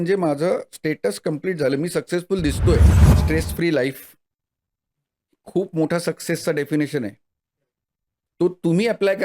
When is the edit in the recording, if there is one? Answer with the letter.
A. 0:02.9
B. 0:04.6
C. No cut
A